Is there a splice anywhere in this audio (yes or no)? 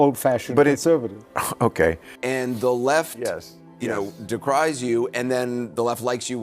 yes